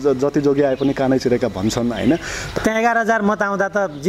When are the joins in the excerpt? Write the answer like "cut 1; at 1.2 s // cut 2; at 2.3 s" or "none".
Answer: cut 1; at 2.5 s